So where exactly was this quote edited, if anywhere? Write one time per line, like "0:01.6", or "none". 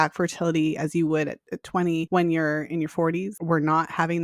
0:02.1
0:03.4